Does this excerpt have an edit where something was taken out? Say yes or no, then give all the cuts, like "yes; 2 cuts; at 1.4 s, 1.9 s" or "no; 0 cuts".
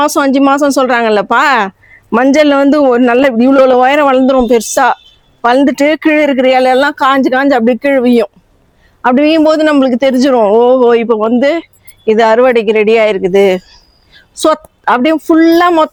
no; 0 cuts